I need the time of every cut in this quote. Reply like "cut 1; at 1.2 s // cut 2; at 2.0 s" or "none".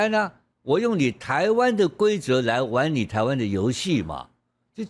none

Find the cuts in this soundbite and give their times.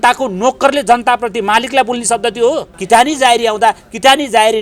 cut 1; at 2.7 s

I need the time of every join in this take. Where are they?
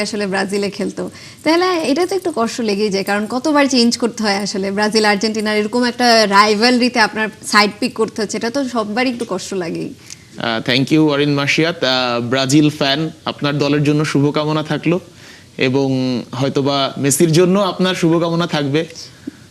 none

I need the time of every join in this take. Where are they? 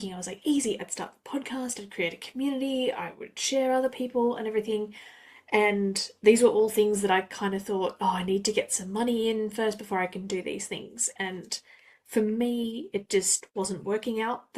none

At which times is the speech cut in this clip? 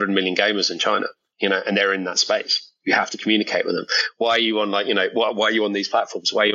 cut 1; at 1.2 s

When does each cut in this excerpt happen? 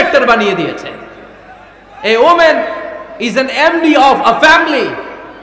none

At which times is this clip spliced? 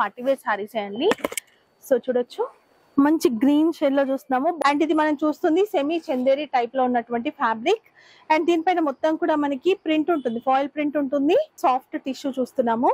cut 1; at 4.6 s // cut 2; at 11.6 s

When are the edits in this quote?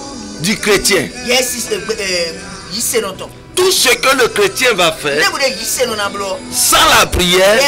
cut 1; at 6.5 s

